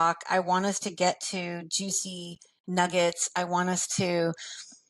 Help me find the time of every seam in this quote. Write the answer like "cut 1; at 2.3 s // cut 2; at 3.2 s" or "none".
none